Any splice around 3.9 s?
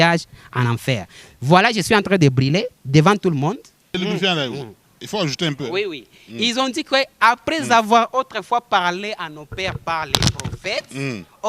yes; 1 cut; at 3.9 s

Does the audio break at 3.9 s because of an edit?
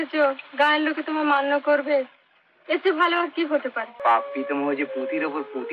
yes; 1 cut; at 3.9 s

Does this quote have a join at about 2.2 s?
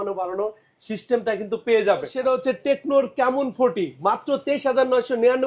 yes; 1 cut; at 2.2 s

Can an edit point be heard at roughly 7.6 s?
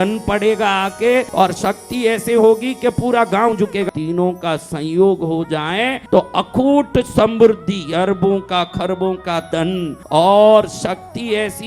no; 4 cuts; at 1.3 s, 3.9 s, 6.0 s, 10.0 s

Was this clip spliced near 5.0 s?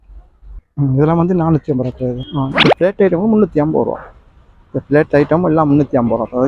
no; 1 cut; at 2.2 s

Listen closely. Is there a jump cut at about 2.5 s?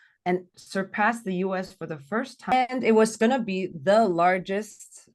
yes; 1 cut; at 2.5 s

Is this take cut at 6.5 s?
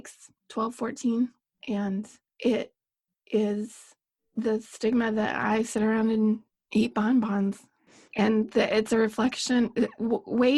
yes; 2 cuts; at 2.2 s, 6.5 s

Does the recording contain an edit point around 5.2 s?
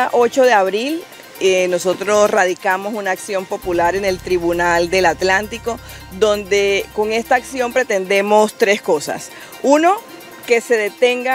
no; 0 cuts

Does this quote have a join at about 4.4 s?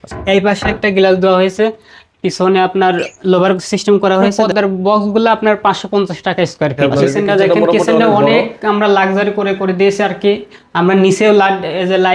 yes; 2 cuts; at 4.4 s, 6.8 s

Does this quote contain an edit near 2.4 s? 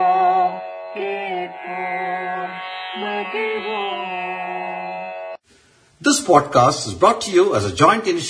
yes; 1 cut; at 2.4 s

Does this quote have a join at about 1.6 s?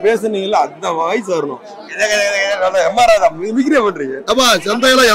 no; 0 cuts

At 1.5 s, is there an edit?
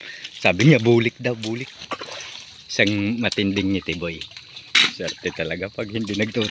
yes; 1 cut; at 1.5 s

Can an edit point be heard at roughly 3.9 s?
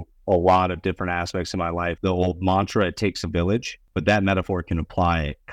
yes; 2 cuts; at 2.0 s, 3.9 s

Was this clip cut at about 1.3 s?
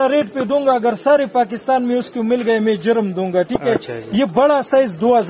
no; 0 cuts

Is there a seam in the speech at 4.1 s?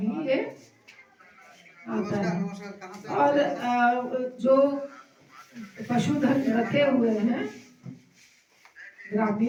no; 0 cuts

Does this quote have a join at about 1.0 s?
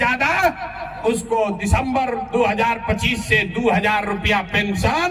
no; 0 cuts

